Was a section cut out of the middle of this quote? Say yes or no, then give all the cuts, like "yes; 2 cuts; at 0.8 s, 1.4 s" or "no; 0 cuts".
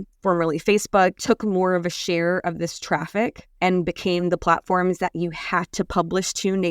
yes; 1 cut; at 3.4 s